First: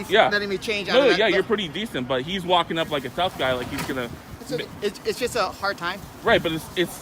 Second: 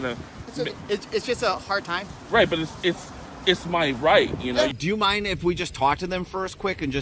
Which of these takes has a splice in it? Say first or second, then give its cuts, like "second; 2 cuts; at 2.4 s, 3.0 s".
second; 1 cut; at 4.8 s